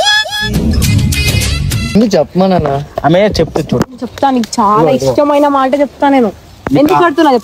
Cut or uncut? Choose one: cut